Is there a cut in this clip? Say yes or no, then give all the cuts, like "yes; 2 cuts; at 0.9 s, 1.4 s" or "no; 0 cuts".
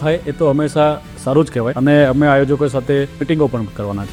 no; 0 cuts